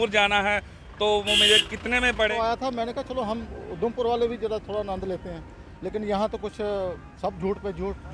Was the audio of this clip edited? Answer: yes; 1 cut; at 2.3 s

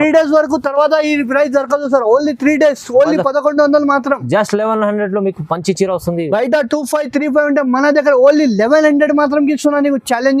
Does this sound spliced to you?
no; 0 cuts

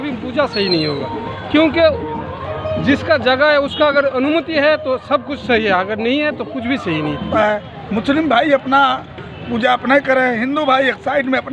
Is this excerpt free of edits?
no; 1 cut; at 7.3 s

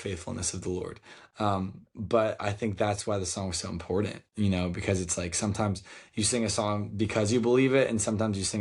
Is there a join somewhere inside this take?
no; 0 cuts

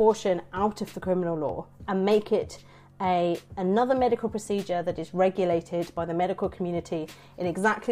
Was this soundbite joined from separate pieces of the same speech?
no; 0 cuts

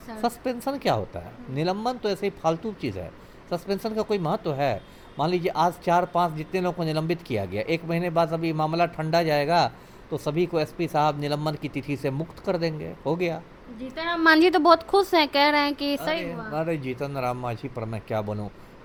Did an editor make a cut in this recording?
no; 0 cuts

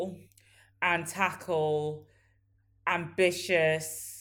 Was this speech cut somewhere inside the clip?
no; 0 cuts

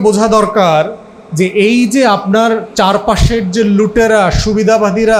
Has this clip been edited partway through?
no; 0 cuts

